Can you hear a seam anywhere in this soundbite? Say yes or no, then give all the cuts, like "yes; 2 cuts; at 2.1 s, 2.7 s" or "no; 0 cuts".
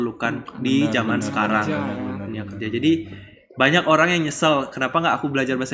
no; 0 cuts